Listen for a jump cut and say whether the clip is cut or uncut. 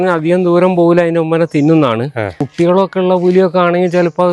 cut